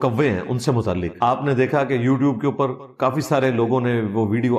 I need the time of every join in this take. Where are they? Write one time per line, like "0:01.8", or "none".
0:01.1